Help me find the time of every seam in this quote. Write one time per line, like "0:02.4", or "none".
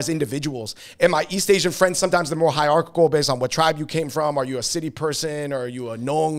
none